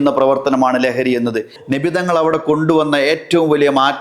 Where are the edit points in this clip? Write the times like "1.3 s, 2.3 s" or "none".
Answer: 1.6 s